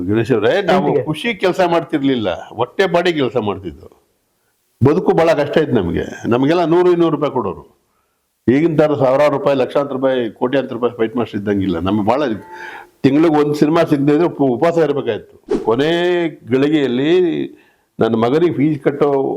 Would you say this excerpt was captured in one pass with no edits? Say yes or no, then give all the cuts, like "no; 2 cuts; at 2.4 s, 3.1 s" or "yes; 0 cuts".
no; 1 cut; at 15.6 s